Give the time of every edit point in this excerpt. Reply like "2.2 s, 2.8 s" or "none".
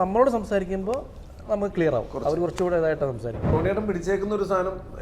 3.5 s

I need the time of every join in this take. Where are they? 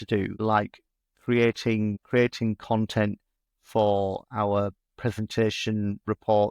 none

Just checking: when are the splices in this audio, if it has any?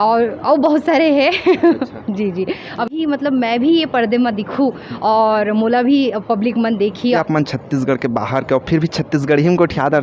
2.9 s, 7.2 s

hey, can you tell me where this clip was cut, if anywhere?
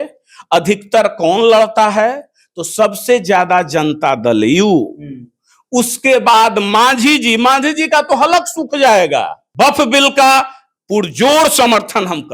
9.4 s

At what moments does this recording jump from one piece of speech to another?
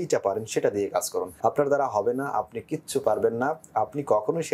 1.3 s

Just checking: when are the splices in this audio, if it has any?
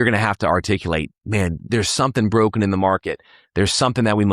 1.7 s

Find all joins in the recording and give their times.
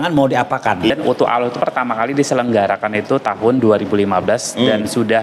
0.9 s

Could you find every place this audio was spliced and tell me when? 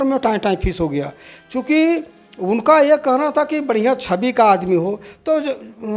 none

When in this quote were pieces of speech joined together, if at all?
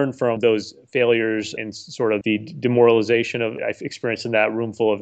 1.8 s, 3.6 s

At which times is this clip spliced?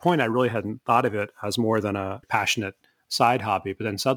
2.2 s

